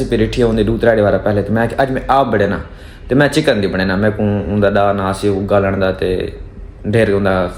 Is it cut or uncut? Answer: uncut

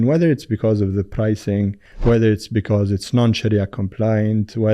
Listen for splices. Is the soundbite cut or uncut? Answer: cut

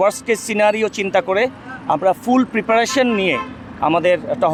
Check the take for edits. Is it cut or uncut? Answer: uncut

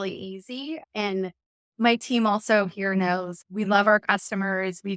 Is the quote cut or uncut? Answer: cut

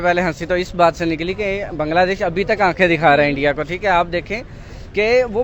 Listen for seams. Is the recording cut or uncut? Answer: uncut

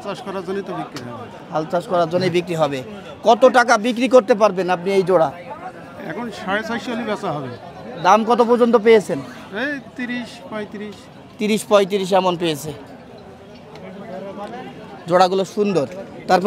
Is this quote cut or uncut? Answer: uncut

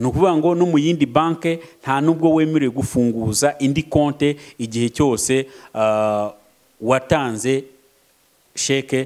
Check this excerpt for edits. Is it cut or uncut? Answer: uncut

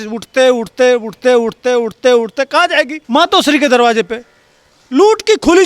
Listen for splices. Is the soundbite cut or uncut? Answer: cut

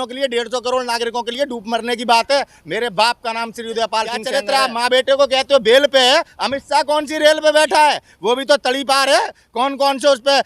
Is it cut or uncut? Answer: cut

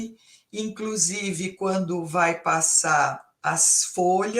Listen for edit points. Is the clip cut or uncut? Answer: cut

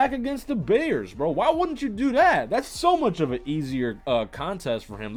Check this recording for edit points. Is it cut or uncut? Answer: uncut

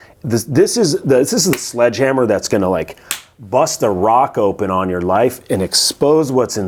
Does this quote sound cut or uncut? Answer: uncut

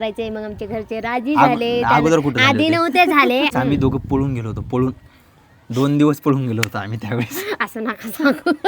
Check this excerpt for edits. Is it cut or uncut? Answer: cut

